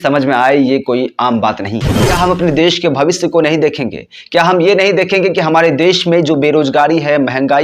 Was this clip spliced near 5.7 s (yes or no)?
no